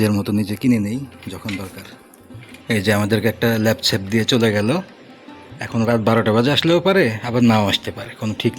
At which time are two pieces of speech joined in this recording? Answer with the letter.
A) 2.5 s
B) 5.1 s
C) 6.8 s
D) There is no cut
A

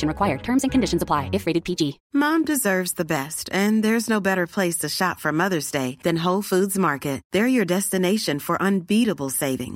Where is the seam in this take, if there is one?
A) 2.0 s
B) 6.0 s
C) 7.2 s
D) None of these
A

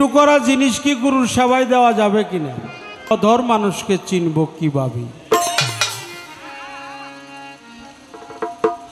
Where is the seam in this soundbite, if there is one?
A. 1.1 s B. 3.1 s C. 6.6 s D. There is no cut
B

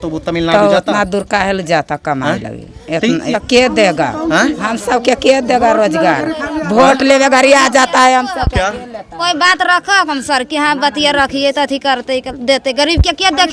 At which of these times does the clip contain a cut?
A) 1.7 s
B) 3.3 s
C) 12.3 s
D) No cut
B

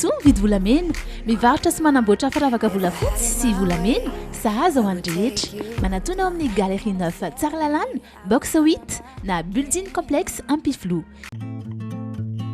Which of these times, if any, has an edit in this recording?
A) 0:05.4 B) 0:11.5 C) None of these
C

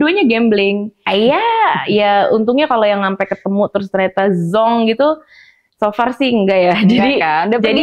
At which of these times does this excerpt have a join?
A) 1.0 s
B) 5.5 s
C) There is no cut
A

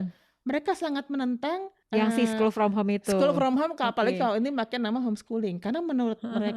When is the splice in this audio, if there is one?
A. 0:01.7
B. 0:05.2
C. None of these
A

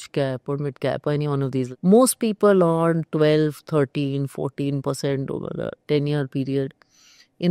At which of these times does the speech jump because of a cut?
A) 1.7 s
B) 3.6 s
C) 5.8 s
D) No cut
A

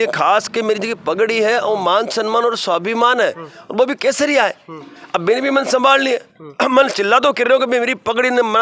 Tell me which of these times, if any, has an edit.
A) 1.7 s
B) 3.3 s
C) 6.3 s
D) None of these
D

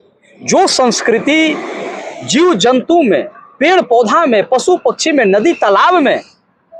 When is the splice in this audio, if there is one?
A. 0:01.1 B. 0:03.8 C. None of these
C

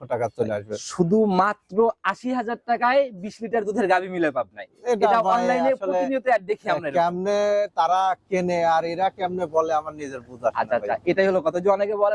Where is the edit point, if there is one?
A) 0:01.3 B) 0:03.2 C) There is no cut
C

